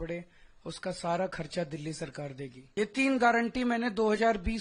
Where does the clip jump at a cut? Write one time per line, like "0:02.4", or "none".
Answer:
0:02.6